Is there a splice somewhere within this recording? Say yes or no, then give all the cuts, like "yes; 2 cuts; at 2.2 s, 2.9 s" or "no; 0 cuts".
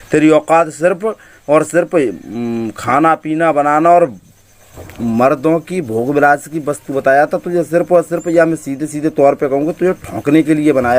no; 0 cuts